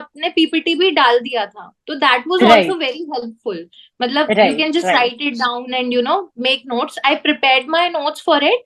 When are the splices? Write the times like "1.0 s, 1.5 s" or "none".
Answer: none